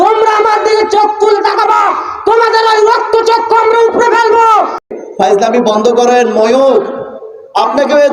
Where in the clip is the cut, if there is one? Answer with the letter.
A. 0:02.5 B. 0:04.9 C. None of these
B